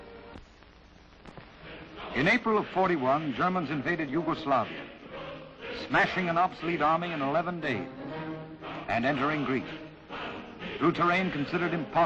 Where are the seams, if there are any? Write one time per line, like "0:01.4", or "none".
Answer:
0:09.0